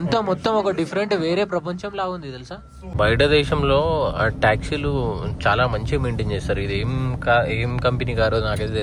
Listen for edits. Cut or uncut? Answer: cut